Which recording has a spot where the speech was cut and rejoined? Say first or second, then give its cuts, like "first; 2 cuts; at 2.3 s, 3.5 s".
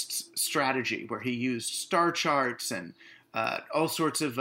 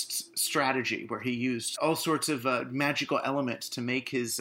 second; 1 cut; at 1.7 s